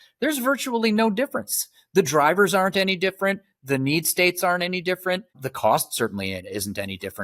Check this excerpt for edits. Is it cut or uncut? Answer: cut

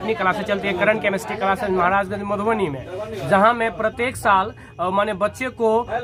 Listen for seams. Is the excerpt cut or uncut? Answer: uncut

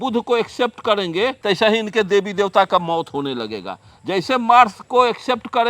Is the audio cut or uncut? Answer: cut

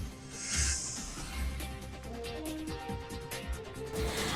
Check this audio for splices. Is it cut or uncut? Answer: uncut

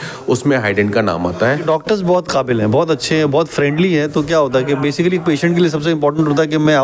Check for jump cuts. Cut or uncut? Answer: cut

